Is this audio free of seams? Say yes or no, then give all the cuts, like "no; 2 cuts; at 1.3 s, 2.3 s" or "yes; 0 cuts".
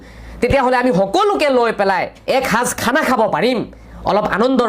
no; 1 cut; at 2.2 s